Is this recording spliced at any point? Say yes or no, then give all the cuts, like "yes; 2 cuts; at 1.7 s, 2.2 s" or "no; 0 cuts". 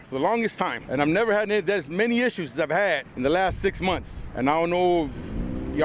yes; 3 cuts; at 0.8 s, 3.1 s, 4.2 s